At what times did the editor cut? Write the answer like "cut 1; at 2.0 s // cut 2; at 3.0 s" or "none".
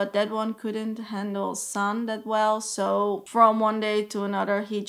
none